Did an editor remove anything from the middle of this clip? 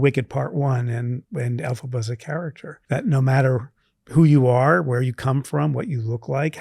yes; 1 cut; at 2.7 s

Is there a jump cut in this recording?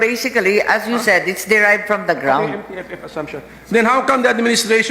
no; 0 cuts

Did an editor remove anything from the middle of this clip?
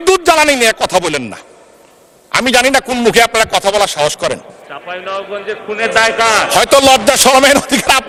no; 0 cuts

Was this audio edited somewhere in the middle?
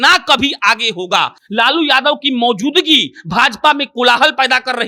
no; 0 cuts

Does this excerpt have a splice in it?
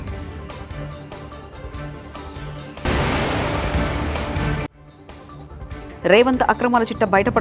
no; 0 cuts

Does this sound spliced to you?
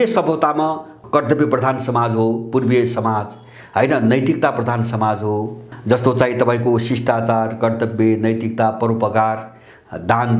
yes; 2 cuts; at 0.9 s, 5.6 s

